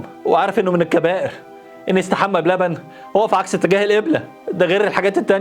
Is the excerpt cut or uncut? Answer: uncut